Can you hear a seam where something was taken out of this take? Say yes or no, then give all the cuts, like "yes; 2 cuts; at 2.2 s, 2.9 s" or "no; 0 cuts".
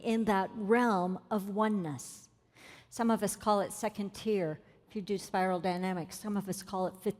no; 0 cuts